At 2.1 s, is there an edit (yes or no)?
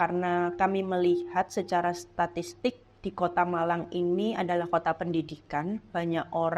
no